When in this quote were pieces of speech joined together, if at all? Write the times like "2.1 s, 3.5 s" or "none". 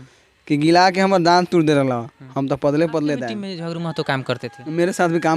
3.4 s